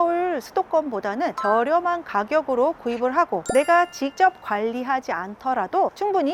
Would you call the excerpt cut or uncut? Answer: cut